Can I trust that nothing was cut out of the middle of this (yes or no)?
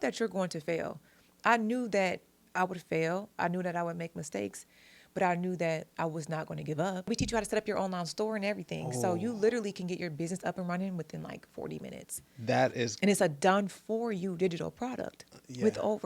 no